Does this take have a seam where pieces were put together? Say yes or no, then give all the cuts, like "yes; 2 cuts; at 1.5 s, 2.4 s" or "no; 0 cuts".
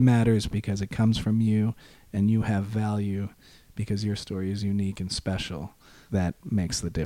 yes; 1 cut; at 6.0 s